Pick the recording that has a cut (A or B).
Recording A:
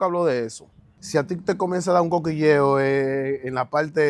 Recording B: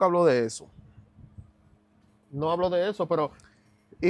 A